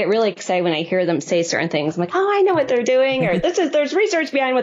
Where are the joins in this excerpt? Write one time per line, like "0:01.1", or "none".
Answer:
none